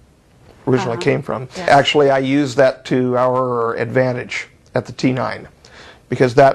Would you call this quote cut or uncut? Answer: cut